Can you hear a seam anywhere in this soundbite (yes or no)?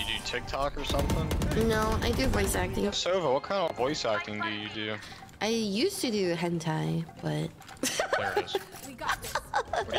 yes